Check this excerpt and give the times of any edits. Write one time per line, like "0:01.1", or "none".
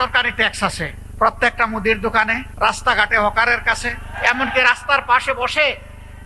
0:01.0
0:02.4
0:04.1